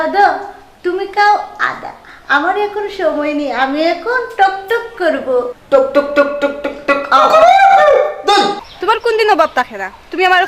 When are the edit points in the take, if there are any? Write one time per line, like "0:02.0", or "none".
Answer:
0:05.5
0:08.6

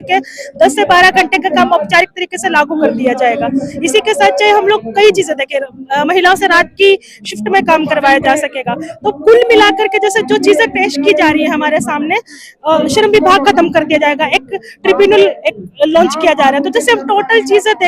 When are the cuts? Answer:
none

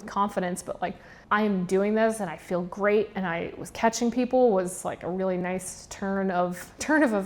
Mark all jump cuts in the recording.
0:01.1

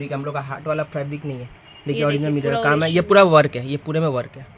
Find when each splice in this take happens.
none

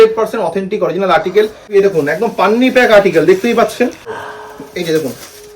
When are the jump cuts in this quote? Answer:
0:01.7
0:04.1

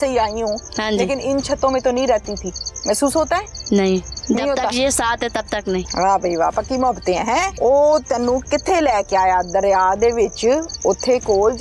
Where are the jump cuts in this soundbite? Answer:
0:05.9
0:07.5

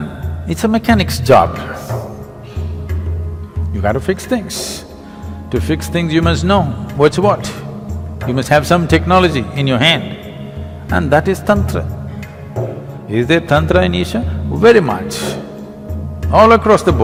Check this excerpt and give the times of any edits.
none

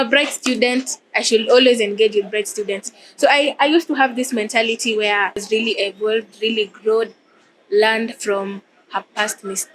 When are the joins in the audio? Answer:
0:05.4

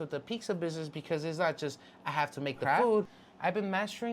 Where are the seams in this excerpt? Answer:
0:03.2

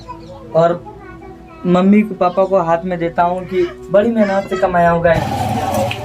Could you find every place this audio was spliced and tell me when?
0:05.0

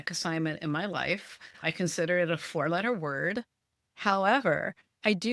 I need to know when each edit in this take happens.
none

